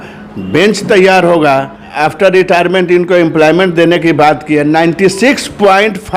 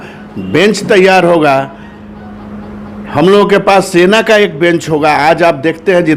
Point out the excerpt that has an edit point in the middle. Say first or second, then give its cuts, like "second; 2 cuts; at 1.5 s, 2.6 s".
first; 1 cut; at 1.8 s